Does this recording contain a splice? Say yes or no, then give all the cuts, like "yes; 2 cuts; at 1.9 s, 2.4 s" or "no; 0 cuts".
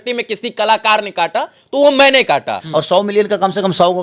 yes; 1 cut; at 2.6 s